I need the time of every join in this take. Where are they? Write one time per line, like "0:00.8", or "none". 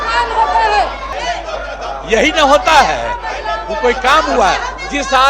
0:01.1